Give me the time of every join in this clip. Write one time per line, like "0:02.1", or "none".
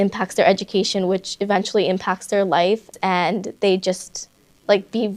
0:02.9